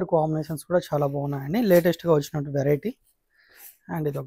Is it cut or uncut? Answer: uncut